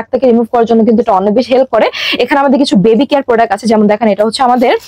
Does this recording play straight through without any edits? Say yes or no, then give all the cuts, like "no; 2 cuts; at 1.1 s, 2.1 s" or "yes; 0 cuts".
yes; 0 cuts